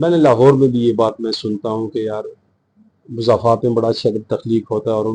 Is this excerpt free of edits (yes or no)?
yes